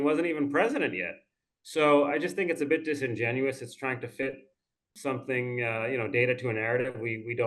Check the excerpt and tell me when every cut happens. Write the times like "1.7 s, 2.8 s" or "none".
4.9 s